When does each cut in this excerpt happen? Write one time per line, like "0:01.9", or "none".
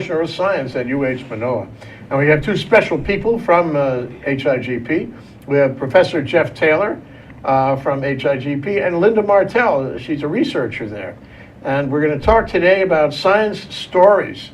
0:01.6